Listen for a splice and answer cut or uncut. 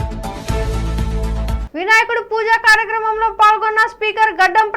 cut